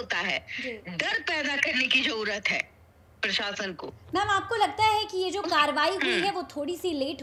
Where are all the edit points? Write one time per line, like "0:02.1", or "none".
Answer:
none